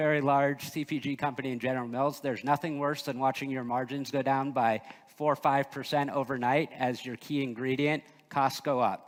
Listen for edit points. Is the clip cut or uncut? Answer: uncut